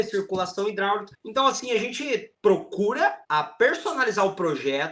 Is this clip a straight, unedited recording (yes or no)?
no